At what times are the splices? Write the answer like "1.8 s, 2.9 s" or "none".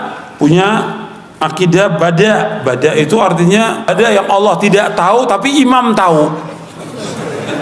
3.9 s

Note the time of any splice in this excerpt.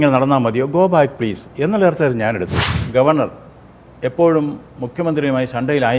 2.7 s

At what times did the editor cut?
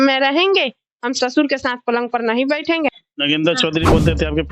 3.1 s

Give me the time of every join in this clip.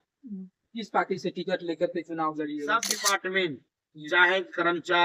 2.9 s

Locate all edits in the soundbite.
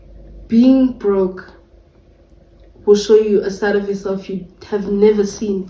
none

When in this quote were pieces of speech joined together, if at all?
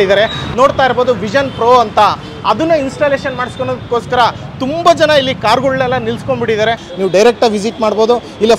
6.9 s

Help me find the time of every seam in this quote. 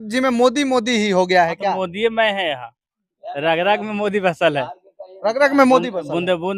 none

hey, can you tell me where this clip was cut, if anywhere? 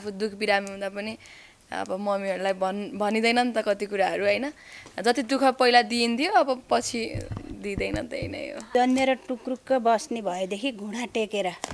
8.6 s

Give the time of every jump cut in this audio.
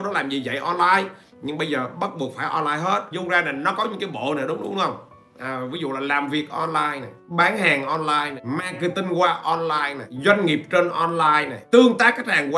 3.1 s, 7.1 s, 8.4 s, 10.0 s, 11.5 s

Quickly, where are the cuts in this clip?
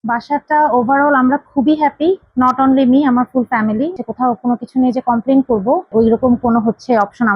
4.0 s, 5.9 s

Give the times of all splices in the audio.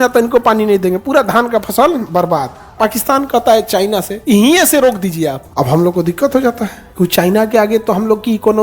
2.5 s, 4.1 s, 5.4 s, 6.8 s

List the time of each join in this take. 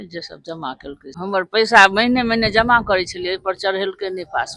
1.1 s

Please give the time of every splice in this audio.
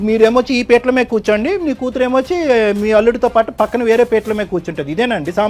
none

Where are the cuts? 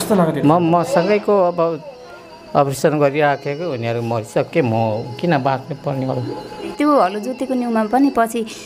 6.8 s

